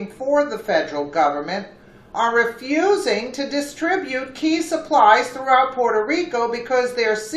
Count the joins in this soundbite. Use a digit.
1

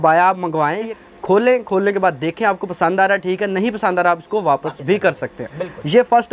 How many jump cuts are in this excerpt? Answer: 1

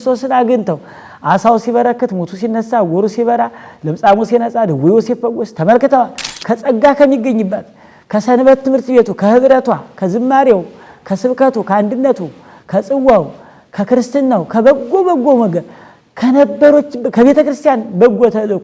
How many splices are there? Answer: 1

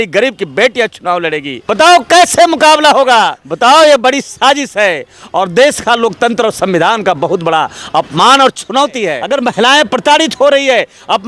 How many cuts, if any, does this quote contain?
3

